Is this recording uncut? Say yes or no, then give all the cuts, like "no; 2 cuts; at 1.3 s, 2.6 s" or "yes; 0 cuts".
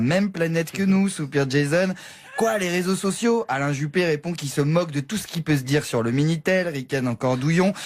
no; 1 cut; at 3.6 s